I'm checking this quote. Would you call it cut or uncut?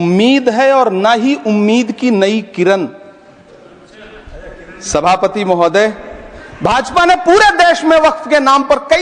uncut